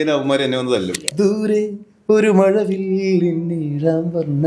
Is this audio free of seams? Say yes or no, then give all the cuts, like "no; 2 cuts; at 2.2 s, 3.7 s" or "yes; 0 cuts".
no; 1 cut; at 1.0 s